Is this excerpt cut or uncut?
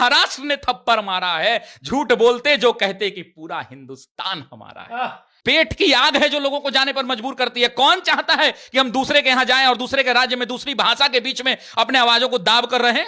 cut